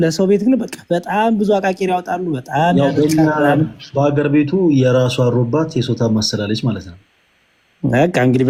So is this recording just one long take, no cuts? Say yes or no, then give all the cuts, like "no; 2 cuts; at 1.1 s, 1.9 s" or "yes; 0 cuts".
yes; 0 cuts